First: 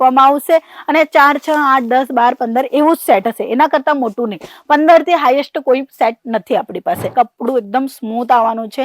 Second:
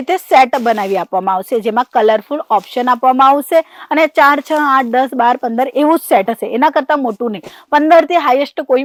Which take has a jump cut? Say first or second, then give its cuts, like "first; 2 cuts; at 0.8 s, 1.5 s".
first; 1 cut; at 7.0 s